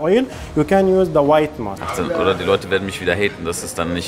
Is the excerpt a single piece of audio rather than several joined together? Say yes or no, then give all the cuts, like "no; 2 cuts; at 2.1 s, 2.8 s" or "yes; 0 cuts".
no; 1 cut; at 1.8 s